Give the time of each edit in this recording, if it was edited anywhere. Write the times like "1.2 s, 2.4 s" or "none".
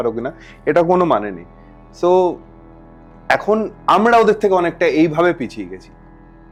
none